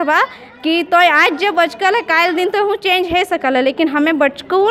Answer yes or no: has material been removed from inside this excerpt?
no